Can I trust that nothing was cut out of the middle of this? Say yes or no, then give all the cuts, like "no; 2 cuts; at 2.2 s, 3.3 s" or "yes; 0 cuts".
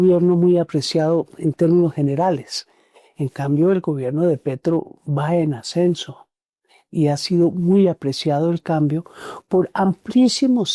yes; 0 cuts